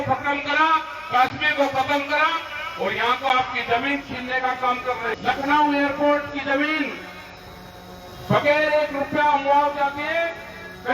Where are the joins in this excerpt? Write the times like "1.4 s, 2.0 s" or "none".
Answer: none